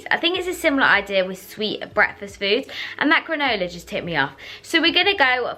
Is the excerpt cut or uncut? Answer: uncut